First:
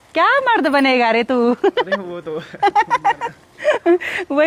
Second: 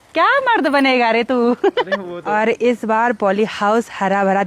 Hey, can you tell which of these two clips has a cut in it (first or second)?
second